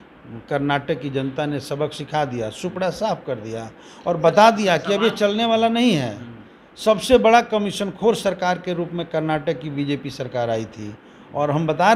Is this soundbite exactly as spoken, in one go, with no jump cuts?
yes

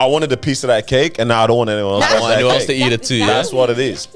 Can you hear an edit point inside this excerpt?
no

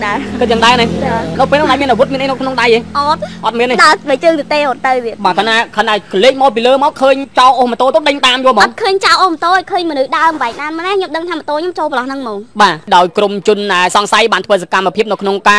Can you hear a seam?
yes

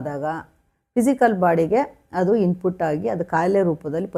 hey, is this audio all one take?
yes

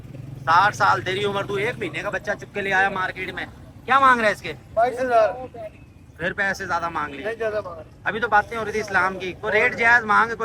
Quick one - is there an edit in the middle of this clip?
no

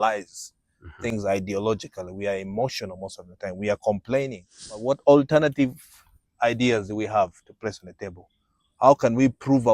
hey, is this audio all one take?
no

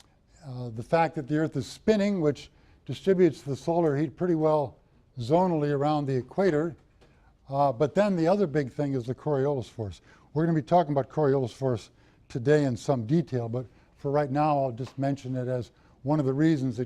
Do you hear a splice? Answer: yes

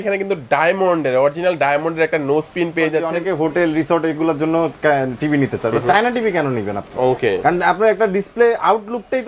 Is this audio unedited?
no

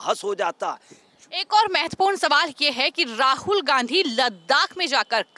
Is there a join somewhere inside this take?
no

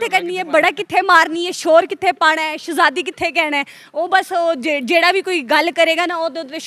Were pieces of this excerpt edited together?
no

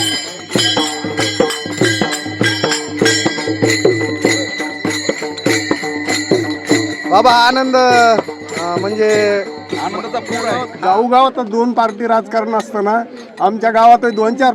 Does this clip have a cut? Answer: yes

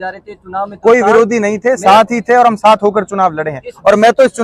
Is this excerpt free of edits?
yes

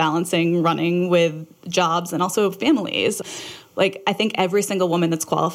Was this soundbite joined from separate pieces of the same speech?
yes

